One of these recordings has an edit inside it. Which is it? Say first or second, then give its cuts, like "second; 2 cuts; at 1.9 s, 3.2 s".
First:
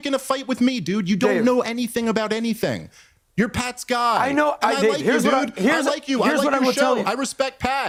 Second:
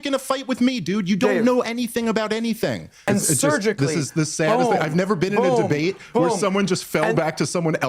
second; 1 cut; at 2.9 s